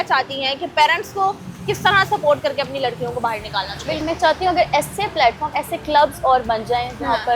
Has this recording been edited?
yes; 1 cut; at 4.0 s

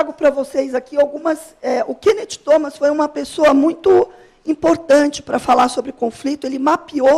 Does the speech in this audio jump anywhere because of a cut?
no; 0 cuts

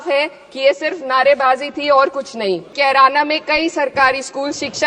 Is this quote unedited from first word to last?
no; 1 cut; at 2.7 s

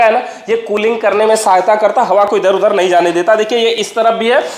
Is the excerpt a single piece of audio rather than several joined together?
yes; 0 cuts

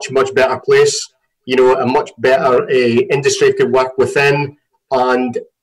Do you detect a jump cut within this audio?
no; 0 cuts

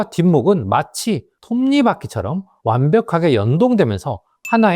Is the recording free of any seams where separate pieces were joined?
no; 2 cuts; at 1.3 s, 2.5 s

